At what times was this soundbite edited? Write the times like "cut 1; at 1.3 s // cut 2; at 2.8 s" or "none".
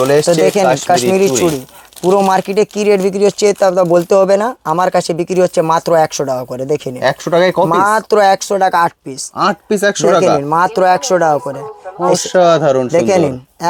none